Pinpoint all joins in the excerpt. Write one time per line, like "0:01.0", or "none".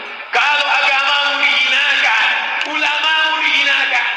none